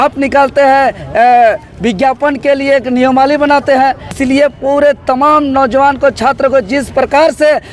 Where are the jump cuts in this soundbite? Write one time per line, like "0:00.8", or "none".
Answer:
0:04.1